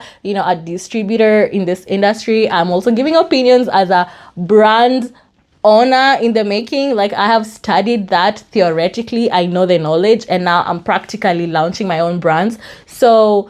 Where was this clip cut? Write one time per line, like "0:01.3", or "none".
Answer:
none